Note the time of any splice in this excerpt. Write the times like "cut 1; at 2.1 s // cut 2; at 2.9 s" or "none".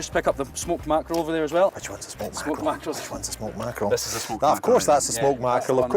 cut 1; at 1.8 s